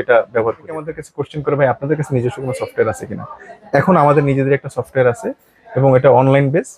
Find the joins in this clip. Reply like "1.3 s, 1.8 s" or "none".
1.0 s